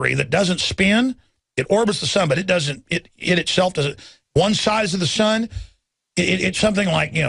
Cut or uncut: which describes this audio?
uncut